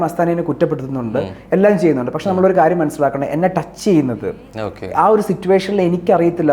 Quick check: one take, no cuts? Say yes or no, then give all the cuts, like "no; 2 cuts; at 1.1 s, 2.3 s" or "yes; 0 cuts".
yes; 0 cuts